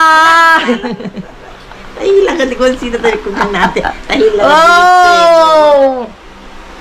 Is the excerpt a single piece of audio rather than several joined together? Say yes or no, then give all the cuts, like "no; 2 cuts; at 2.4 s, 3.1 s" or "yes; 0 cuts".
yes; 0 cuts